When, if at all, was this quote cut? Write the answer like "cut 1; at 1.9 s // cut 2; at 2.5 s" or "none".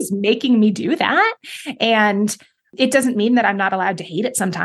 cut 1; at 2.7 s